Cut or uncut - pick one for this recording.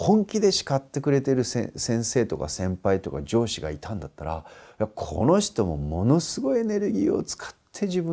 uncut